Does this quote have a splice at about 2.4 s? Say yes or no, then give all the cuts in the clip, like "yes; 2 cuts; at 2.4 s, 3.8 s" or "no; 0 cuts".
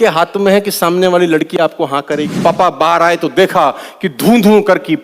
yes; 1 cut; at 2.4 s